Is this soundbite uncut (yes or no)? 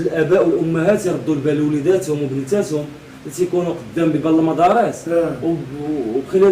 yes